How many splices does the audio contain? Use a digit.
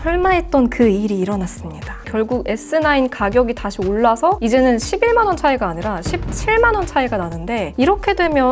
1